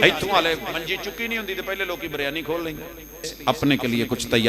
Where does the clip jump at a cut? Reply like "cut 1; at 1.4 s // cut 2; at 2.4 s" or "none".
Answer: cut 1; at 3.2 s